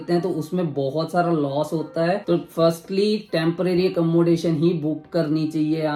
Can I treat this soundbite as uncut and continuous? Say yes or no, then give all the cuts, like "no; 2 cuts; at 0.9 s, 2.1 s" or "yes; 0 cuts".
yes; 0 cuts